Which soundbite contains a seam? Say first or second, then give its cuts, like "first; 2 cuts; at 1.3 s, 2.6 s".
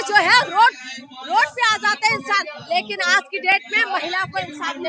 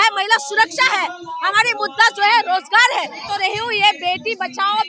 second; 1 cut; at 3.3 s